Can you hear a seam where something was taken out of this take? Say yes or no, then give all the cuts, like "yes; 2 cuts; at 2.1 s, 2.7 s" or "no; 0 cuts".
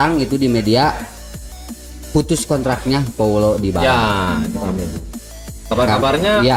no; 0 cuts